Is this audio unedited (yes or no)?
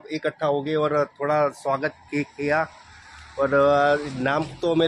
yes